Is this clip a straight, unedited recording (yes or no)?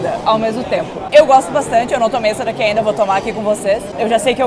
yes